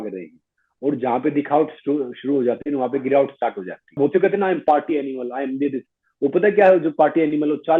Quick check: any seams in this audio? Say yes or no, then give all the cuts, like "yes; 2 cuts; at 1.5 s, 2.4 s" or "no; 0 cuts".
yes; 1 cut; at 4.0 s